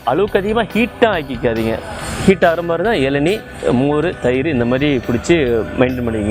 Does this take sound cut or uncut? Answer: uncut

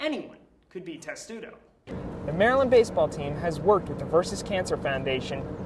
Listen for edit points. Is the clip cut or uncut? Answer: cut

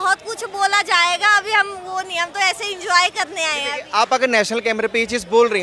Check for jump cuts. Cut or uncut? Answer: uncut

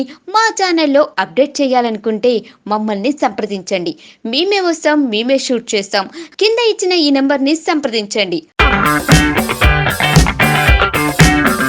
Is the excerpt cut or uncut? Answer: uncut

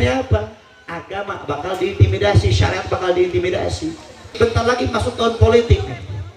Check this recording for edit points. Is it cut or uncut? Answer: cut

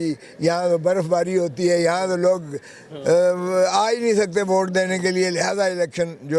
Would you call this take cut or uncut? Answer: uncut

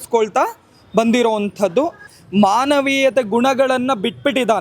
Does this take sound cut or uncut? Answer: cut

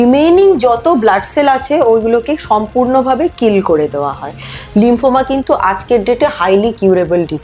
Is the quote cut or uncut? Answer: cut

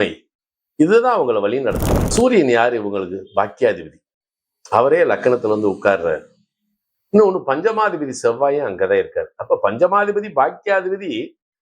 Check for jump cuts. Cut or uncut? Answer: cut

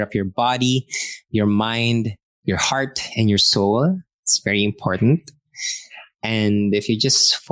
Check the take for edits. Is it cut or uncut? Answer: cut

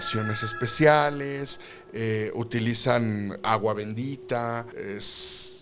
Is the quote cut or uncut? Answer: cut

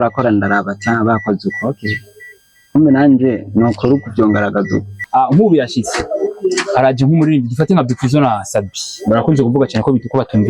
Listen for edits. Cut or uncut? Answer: cut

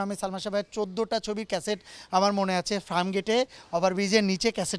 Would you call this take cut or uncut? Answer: uncut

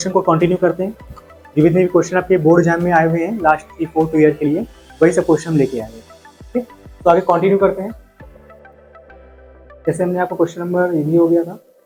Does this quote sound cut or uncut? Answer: uncut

